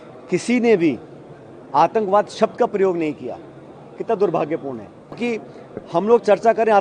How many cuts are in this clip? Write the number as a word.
one